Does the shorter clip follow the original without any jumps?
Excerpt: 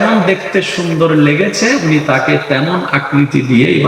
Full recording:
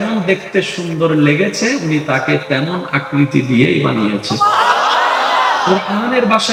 yes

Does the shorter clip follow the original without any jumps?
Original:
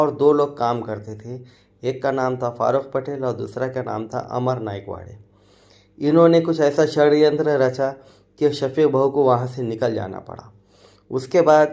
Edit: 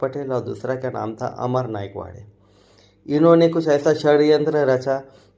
yes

